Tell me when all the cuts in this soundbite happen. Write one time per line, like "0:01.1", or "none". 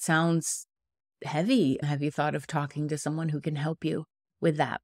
none

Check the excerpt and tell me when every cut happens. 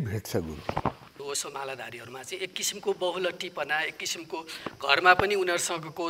0:01.2

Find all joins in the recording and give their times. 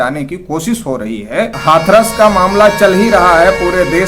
0:01.5

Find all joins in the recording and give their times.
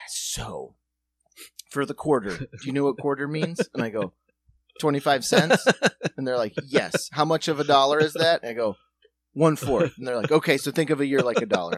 none

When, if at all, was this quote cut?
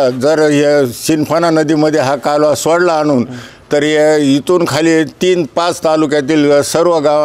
0:03.5

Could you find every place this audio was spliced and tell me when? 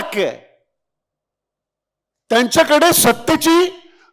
none

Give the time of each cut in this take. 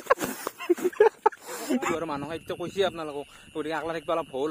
0:01.9

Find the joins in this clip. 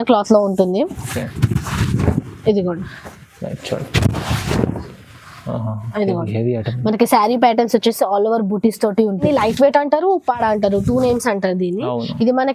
0:09.3

